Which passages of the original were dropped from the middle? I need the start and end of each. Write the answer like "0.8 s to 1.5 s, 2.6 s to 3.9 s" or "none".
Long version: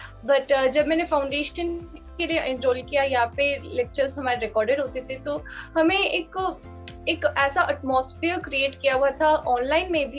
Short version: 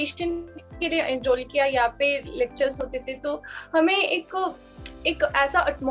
4.2 s to 4.8 s